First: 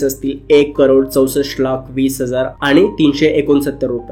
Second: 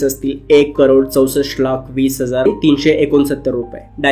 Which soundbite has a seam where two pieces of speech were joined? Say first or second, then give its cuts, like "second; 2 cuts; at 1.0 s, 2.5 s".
second; 1 cut; at 2.5 s